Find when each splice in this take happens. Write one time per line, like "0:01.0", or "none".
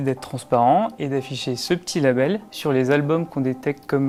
none